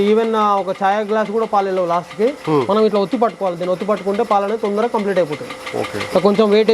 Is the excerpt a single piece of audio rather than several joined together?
yes; 0 cuts

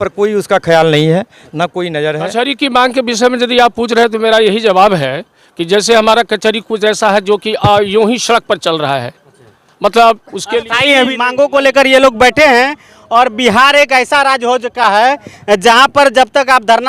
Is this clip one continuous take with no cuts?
no; 2 cuts; at 2.2 s, 11.2 s

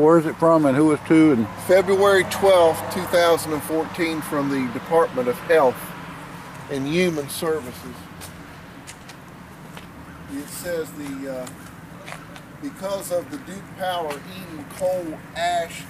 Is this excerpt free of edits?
yes; 0 cuts

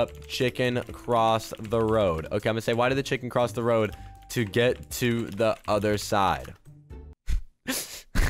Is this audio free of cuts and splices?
yes; 0 cuts

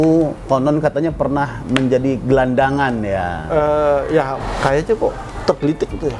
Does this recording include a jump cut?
yes; 1 cut; at 4.4 s

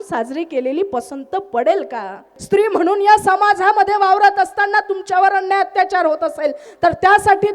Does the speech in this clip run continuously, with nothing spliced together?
no; 1 cut; at 2.3 s

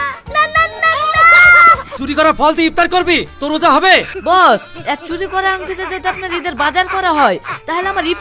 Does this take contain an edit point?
yes; 2 cuts; at 1.9 s, 4.1 s

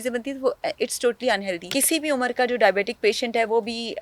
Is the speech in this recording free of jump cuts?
no; 1 cut; at 1.6 s

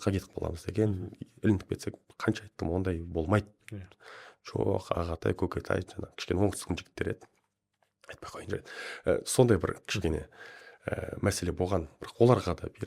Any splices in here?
no; 0 cuts

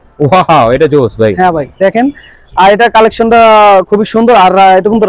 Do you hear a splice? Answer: no; 0 cuts

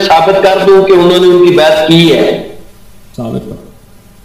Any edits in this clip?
no; 0 cuts

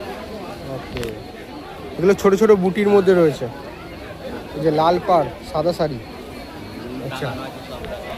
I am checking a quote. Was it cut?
no; 0 cuts

